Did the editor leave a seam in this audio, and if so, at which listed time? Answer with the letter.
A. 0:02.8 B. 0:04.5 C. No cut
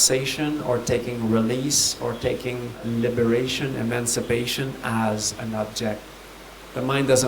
A